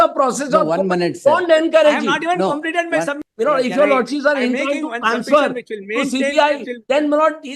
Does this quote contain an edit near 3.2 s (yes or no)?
yes